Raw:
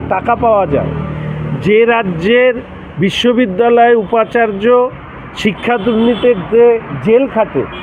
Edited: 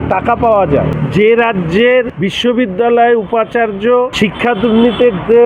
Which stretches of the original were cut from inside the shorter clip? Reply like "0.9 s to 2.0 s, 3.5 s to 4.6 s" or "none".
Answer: 1.0 s to 1.5 s, 2.7 s to 3.0 s, 4.9 s to 5.4 s